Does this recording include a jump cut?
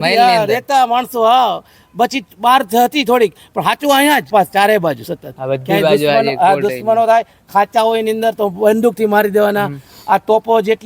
yes; 1 cut; at 4.3 s

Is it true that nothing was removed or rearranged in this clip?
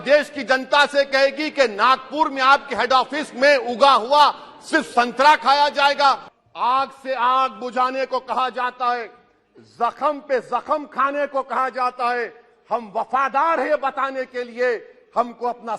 no; 1 cut; at 6.3 s

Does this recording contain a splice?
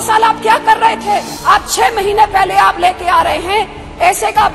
yes; 1 cut; at 1.3 s

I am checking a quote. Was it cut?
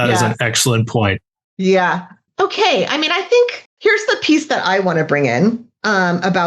yes; 2 cuts; at 2.2 s, 3.6 s

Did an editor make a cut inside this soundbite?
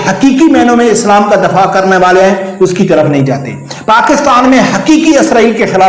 no; 0 cuts

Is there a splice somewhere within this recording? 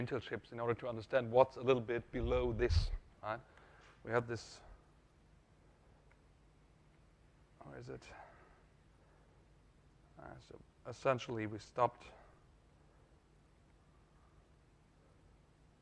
yes; 1 cut; at 14.6 s

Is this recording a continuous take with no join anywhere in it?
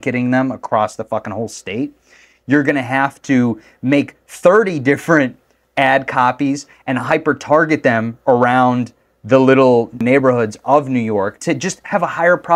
no; 2 cuts; at 10.0 s, 11.4 s

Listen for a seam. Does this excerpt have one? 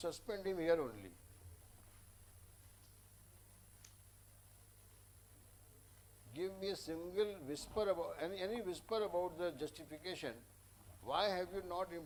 no; 0 cuts

